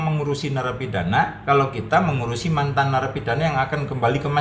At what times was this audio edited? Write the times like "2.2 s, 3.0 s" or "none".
none